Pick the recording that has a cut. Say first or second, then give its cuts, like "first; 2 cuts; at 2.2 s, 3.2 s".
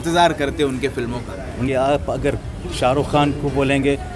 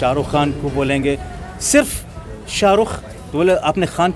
first; 1 cut; at 1.6 s